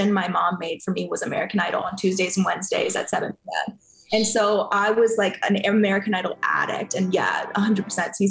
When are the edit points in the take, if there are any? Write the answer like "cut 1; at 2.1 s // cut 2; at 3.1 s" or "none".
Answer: none